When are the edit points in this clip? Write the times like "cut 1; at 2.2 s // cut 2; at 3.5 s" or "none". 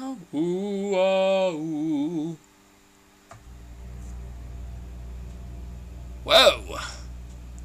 none